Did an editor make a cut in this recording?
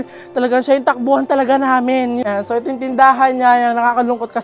yes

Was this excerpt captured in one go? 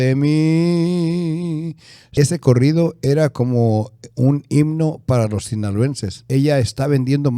no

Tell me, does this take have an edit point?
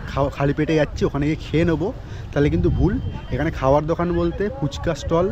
no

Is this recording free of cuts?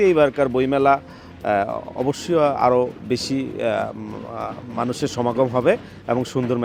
yes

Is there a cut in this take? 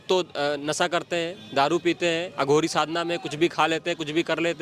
no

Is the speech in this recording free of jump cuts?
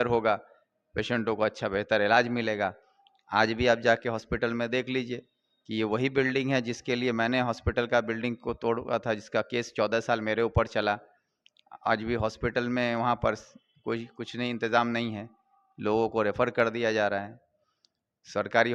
yes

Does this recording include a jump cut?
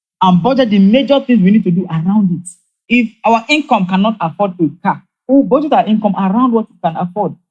yes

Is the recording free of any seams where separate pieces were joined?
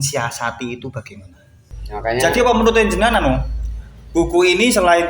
no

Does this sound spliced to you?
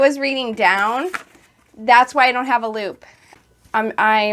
yes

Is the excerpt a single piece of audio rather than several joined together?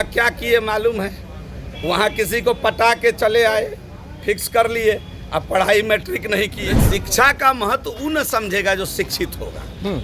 no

